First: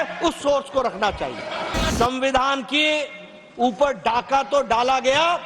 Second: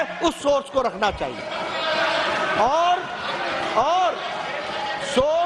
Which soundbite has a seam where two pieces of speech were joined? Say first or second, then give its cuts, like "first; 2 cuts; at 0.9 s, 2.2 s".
first; 1 cut; at 1.9 s